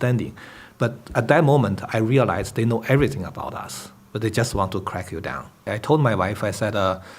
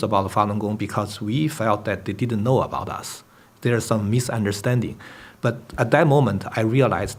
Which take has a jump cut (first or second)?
first